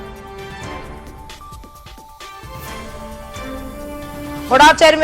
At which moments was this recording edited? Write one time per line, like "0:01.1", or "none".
0:03.4